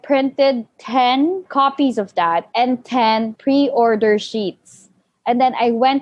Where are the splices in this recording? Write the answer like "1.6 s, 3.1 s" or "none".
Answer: 1.5 s, 2.5 s, 3.3 s